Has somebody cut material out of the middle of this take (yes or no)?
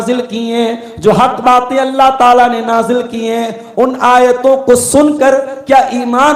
no